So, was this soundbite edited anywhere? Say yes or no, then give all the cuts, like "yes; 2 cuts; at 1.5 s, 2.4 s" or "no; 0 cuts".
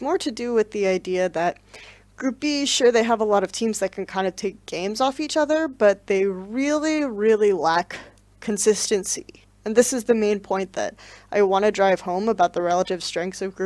no; 0 cuts